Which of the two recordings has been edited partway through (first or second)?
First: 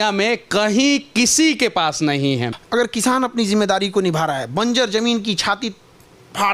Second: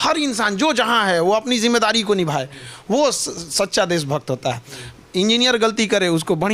first